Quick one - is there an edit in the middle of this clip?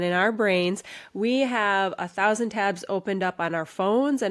no; 0 cuts

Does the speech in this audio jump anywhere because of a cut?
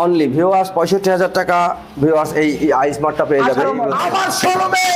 yes; 1 cut; at 3.9 s

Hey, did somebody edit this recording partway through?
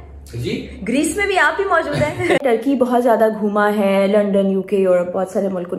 yes; 1 cut; at 2.4 s

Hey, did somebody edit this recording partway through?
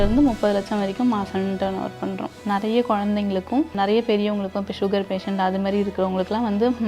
yes; 2 cuts; at 2.4 s, 3.7 s

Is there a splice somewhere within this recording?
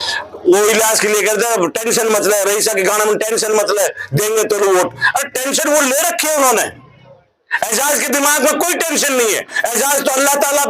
no; 0 cuts

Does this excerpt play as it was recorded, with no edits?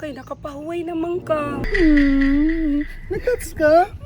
no; 1 cut; at 1.6 s

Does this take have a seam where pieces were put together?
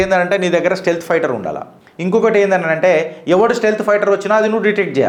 no; 0 cuts

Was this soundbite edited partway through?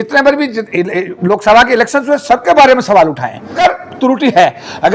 yes; 1 cut; at 3.6 s

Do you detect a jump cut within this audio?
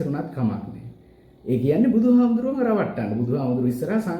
no; 0 cuts

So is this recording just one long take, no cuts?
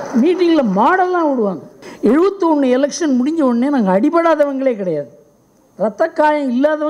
no; 1 cut; at 1.8 s

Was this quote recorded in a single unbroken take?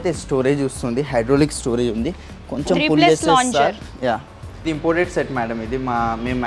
no; 1 cut; at 4.5 s

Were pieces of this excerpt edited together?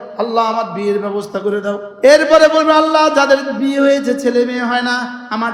no; 0 cuts

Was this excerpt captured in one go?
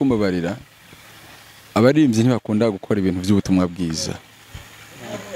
yes; 0 cuts

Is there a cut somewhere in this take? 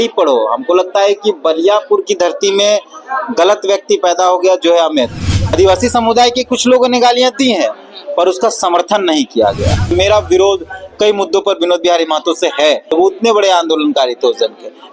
yes; 3 cuts; at 5.5 s, 9.9 s, 12.8 s

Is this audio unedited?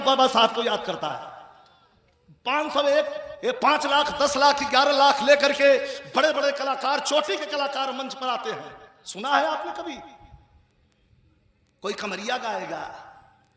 yes; 0 cuts

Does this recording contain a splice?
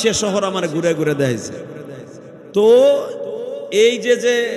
no; 0 cuts

